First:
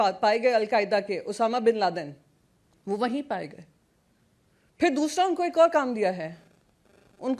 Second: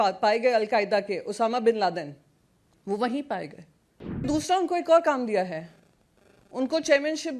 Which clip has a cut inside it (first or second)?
second